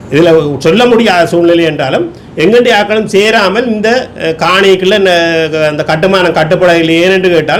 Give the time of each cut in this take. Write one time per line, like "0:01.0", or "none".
none